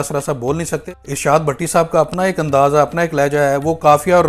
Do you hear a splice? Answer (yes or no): yes